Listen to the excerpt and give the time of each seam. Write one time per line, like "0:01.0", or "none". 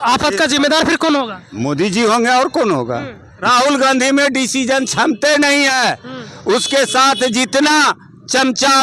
0:03.3